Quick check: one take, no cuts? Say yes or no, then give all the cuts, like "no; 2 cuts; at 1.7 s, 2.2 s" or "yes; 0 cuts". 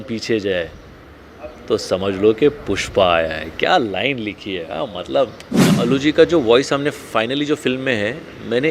no; 1 cut; at 5.7 s